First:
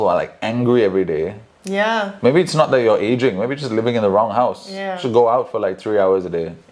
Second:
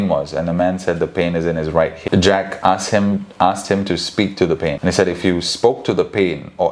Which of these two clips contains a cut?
second; 2 cuts; at 2.0 s, 4.8 s

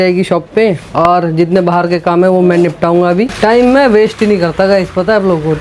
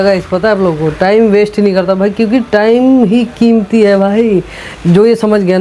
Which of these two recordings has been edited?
first; 1 cut; at 3.3 s

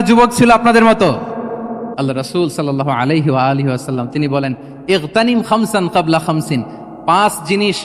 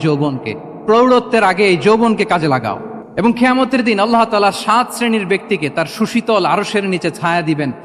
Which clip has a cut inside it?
first; 1 cut; at 1.9 s

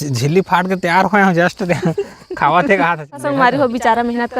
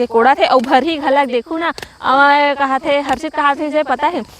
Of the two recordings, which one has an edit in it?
first; 1 cut; at 3.2 s

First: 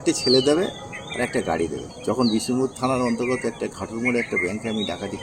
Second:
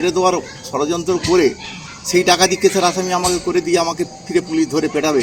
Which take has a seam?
first; 1 cut; at 1.9 s

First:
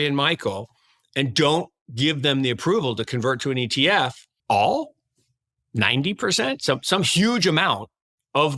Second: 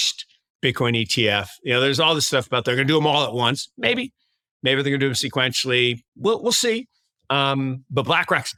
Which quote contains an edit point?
first; 1 cut; at 4.3 s

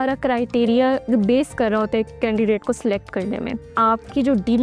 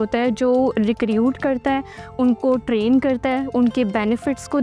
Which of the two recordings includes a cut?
first; 1 cut; at 3.7 s

